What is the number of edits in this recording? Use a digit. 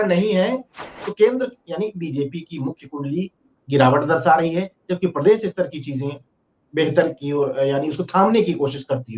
1